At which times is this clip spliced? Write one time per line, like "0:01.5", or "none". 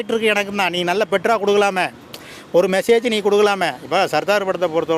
none